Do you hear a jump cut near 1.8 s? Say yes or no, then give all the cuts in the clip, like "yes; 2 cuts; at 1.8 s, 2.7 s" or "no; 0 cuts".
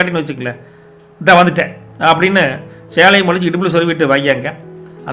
no; 0 cuts